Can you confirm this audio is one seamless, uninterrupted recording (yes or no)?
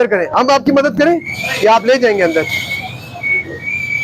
yes